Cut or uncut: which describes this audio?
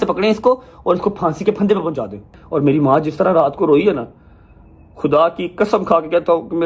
cut